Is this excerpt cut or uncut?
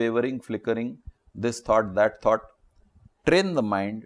uncut